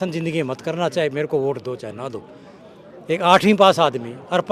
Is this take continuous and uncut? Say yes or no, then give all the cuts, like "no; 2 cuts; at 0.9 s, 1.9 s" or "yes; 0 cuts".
yes; 0 cuts